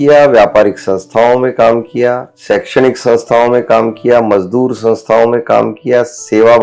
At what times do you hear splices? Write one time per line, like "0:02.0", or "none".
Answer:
0:02.3